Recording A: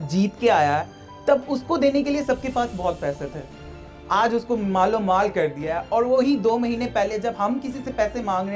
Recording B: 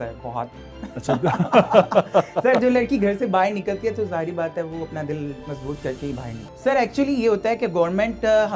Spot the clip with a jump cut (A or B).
B